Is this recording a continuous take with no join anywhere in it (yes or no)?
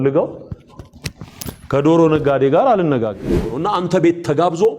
no